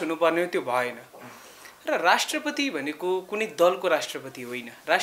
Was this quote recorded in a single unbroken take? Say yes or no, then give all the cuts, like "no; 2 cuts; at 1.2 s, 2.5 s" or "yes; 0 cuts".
yes; 0 cuts